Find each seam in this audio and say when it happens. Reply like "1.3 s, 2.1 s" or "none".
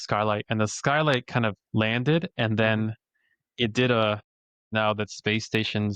4.6 s